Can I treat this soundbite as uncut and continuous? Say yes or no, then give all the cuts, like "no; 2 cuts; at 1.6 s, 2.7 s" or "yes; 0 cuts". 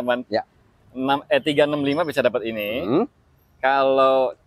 yes; 0 cuts